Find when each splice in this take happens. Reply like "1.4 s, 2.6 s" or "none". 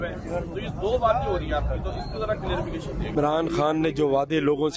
3.1 s

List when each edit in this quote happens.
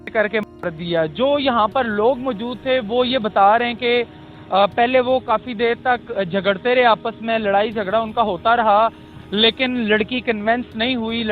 none

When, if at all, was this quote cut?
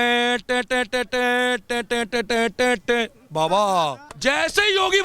4.1 s

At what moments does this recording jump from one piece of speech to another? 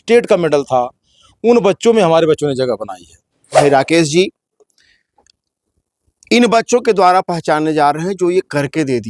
3.6 s

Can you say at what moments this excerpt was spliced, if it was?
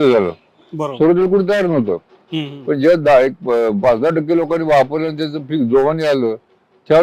none

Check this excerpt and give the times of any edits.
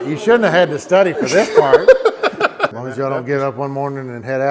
2.7 s

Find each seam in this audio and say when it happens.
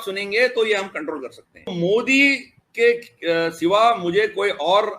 1.7 s

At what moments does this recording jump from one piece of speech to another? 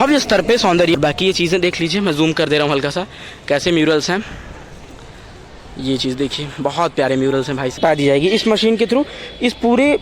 1.0 s, 7.8 s

